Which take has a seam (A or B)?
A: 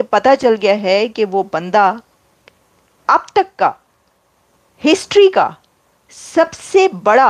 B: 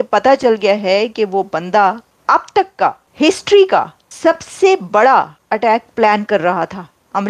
B